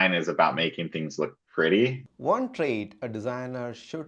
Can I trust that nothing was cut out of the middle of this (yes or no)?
no